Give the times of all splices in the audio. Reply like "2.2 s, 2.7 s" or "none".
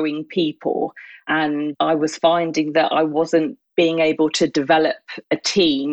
1.4 s